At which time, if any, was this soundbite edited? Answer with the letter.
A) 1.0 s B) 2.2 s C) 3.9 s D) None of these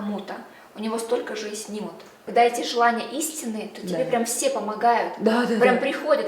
B